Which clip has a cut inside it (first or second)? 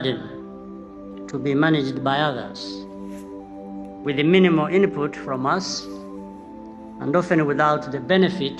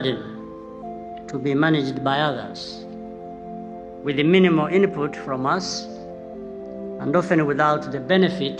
second